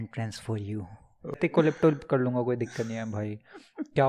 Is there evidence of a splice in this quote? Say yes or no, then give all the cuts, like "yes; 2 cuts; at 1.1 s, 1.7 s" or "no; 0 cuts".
yes; 1 cut; at 1.4 s